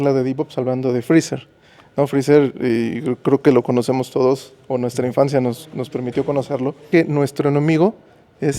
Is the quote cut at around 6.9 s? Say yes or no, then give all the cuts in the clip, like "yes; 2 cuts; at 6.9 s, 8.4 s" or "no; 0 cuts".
yes; 1 cut; at 6.9 s